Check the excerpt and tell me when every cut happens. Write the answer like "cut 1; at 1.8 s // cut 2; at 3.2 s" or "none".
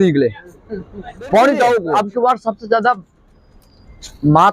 cut 1; at 1.9 s